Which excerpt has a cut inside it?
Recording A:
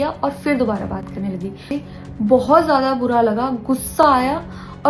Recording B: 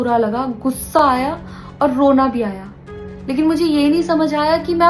A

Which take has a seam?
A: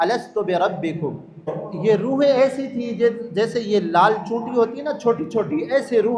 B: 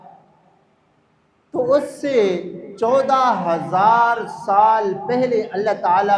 A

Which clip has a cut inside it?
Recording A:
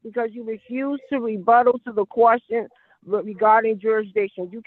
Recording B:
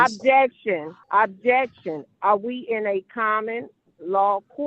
B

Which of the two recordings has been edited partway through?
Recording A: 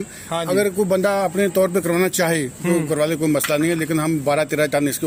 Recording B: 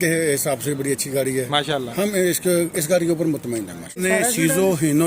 B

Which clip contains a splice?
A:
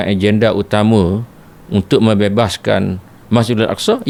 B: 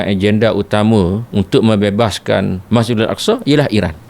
B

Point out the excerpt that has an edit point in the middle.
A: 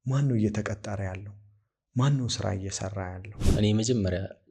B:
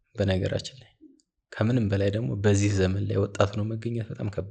A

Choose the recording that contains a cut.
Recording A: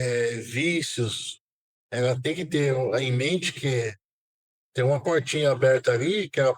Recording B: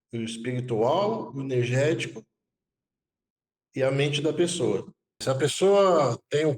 B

